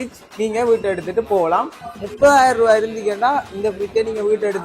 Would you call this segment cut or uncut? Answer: cut